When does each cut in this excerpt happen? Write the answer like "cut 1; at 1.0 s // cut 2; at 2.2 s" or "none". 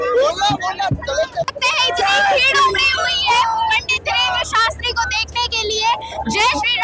cut 1; at 1.5 s